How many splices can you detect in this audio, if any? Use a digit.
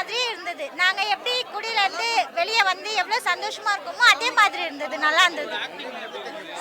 0